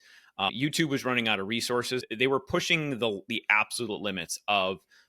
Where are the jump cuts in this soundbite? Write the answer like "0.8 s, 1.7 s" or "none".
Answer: 2.0 s